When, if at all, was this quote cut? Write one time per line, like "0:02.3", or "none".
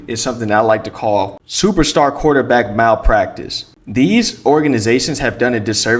none